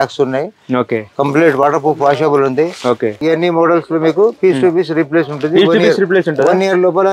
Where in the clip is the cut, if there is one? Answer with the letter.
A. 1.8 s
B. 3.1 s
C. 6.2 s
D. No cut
B